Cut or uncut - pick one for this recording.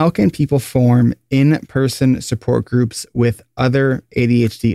uncut